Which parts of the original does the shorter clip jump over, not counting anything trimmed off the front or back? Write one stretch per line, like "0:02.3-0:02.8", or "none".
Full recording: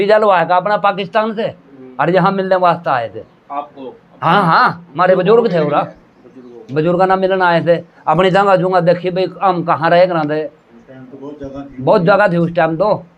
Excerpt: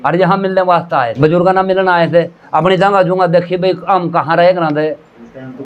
0:03.1-0:06.7